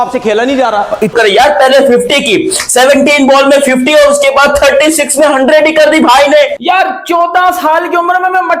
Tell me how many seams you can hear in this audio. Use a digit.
2